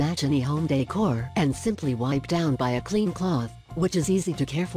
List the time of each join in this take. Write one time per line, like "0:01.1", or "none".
none